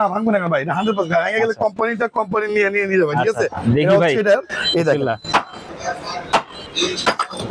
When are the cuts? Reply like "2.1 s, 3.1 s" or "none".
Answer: 5.6 s, 6.6 s